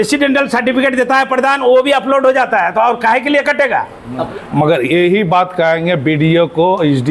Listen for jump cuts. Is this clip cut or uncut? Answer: cut